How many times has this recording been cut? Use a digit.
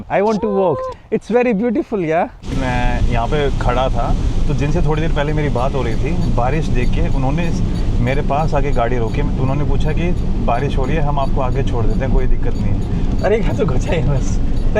2